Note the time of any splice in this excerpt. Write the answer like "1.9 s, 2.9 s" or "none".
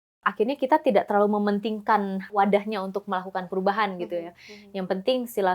2.3 s